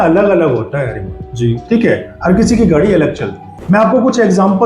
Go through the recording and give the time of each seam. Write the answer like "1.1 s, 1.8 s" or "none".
3.5 s